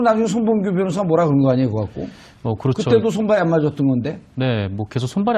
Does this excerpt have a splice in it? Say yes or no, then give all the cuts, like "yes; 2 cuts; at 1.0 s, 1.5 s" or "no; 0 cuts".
yes; 1 cut; at 1.5 s